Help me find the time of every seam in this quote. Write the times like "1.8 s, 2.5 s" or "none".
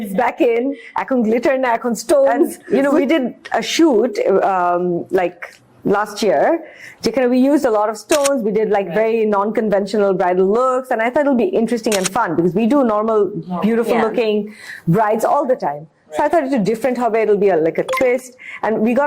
2.6 s